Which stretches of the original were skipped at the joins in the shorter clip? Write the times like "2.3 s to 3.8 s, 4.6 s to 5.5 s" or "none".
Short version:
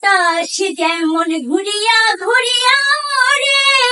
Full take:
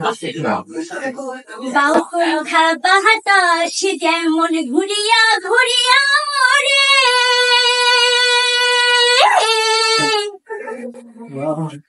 none